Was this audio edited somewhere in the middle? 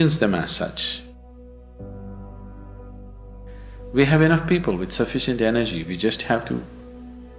no; 0 cuts

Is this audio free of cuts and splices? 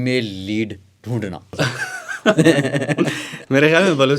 no; 1 cut; at 1.6 s

